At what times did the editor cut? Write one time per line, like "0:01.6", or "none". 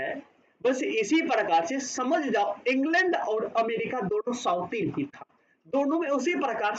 none